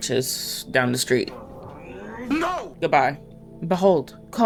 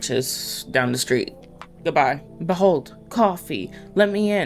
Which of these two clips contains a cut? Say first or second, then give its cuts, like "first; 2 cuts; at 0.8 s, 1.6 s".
second; 2 cuts; at 1.7 s, 2.3 s